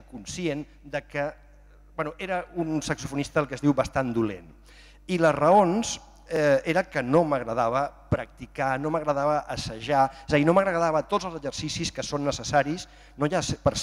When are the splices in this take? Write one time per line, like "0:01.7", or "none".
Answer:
0:06.5

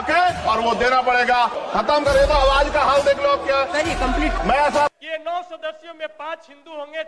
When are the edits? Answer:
0:04.9

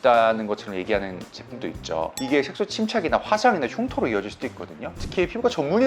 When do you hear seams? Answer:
0:02.2
0:04.9

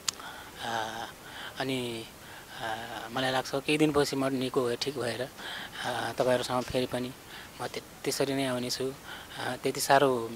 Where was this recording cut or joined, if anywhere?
none

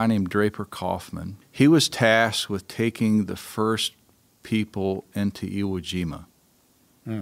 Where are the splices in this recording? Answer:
0:01.4

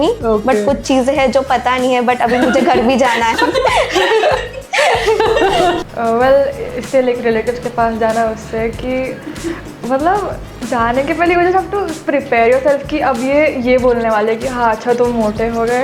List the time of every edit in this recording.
0:03.4
0:05.8

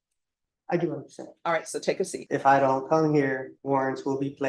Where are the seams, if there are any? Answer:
0:02.2
0:03.5

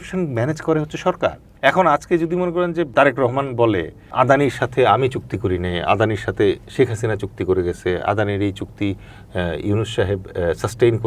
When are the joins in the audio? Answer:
0:01.5
0:02.9
0:04.1

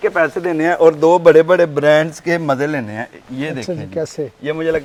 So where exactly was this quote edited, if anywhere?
none

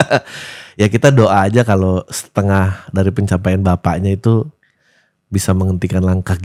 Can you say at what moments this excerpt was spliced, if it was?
none

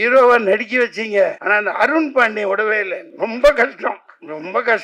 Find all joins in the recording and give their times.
0:01.4
0:03.0

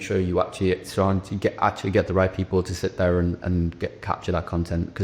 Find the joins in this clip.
none

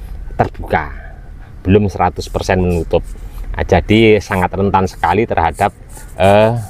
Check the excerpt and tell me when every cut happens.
none

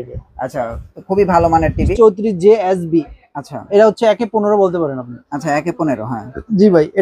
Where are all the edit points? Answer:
0:01.9

